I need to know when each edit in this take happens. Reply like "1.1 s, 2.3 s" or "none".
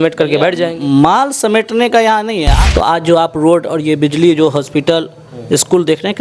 2.5 s